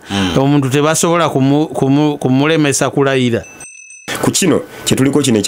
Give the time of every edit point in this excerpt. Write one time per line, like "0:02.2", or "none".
0:03.8